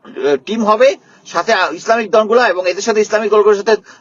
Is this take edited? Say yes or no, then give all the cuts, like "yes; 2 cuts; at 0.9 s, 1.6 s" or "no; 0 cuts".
no; 0 cuts